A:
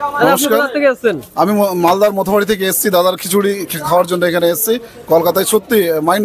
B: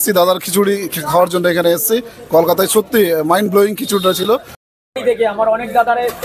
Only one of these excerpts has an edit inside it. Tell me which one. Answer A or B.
B